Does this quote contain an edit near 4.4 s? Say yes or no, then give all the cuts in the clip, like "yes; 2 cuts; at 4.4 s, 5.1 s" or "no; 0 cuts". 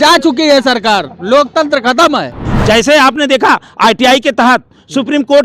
no; 1 cut; at 2.5 s